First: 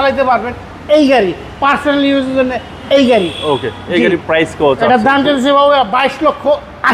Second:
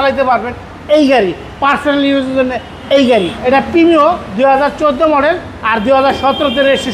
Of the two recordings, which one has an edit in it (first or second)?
second